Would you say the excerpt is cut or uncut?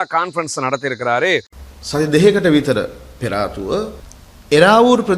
cut